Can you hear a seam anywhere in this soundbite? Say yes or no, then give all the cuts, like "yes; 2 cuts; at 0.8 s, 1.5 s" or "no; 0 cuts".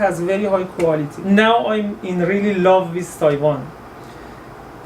yes; 1 cut; at 1.1 s